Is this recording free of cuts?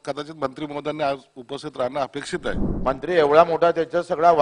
no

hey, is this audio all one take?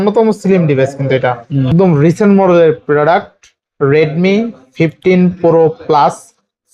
no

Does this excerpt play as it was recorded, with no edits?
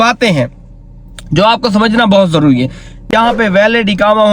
no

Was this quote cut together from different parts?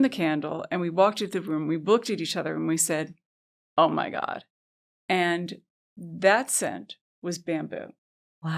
no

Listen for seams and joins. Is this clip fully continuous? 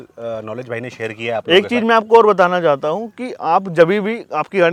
yes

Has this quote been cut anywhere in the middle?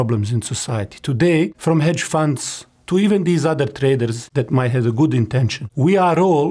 yes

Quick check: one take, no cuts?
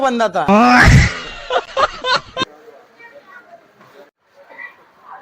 no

